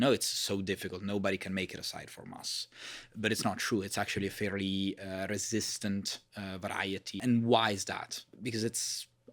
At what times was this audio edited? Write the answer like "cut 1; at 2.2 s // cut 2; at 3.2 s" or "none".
cut 1; at 7.2 s // cut 2; at 8.2 s